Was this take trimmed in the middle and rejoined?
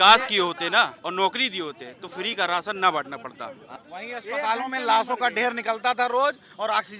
yes; 2 cuts; at 1.0 s, 3.6 s

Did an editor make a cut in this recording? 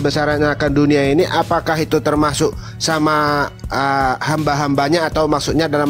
no; 0 cuts

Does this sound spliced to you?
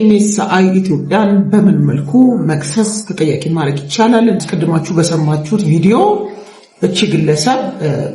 yes; 1 cut; at 4.4 s

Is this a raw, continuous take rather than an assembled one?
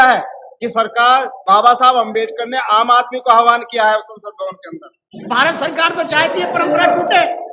no; 1 cut; at 5.1 s

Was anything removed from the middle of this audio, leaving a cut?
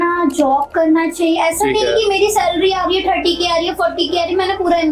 yes; 1 cut; at 1.4 s

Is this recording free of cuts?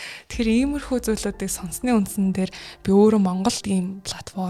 yes; 0 cuts

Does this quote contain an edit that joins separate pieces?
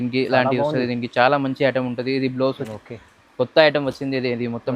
yes; 1 cut; at 2.6 s

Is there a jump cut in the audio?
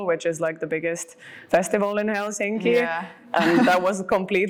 no; 0 cuts

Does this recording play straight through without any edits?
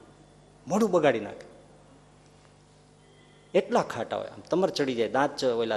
yes; 0 cuts

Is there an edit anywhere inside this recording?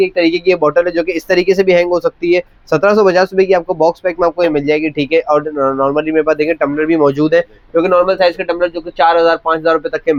no; 0 cuts

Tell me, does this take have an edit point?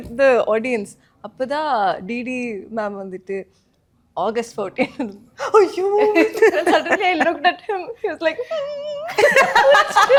no; 0 cuts

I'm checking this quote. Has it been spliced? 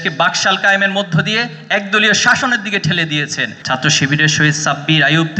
yes; 1 cut; at 3.5 s

